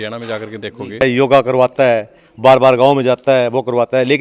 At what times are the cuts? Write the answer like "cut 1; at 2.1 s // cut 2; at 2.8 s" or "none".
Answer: cut 1; at 1.0 s